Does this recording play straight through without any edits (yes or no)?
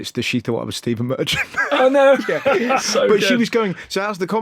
no